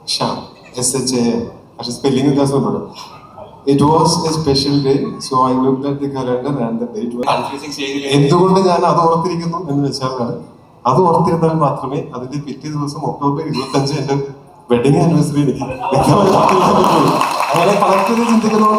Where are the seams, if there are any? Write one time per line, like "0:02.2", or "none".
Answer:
0:07.2